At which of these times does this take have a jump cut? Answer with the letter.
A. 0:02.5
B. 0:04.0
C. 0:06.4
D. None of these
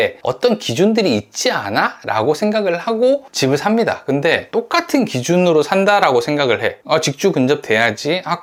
D